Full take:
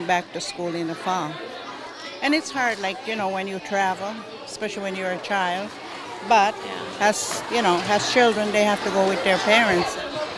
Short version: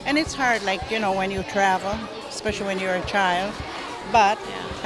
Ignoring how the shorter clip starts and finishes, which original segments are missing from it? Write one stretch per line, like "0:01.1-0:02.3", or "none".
none